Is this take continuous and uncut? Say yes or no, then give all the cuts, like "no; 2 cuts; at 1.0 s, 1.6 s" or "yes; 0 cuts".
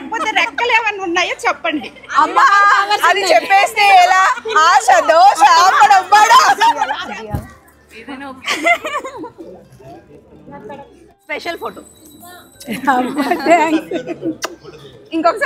no; 2 cuts; at 6.9 s, 10.9 s